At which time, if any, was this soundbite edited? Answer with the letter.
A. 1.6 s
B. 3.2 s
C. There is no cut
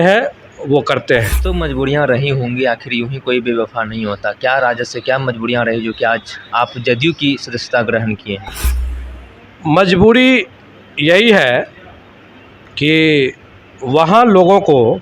A